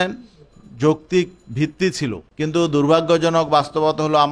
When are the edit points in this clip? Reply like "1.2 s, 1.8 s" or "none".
2.2 s